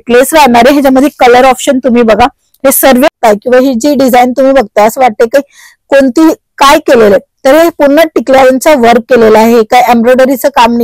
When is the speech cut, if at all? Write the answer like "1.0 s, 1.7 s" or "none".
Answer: 3.1 s